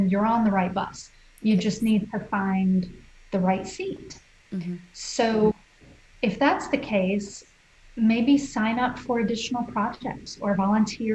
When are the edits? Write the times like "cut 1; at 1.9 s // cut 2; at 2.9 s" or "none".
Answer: none